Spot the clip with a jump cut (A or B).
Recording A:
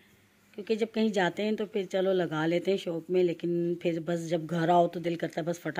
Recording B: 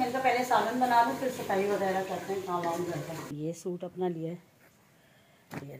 B